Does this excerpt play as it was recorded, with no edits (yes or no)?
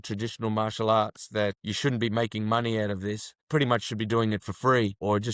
no